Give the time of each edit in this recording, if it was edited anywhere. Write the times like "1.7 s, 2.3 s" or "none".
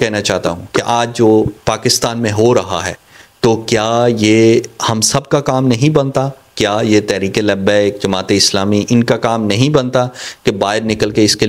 none